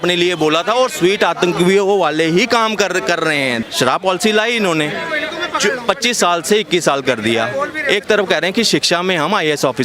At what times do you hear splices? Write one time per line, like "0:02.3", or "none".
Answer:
0:03.6